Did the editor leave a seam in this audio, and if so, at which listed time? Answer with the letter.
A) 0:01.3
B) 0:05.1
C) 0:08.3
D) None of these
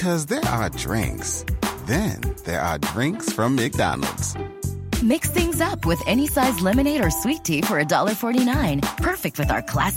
D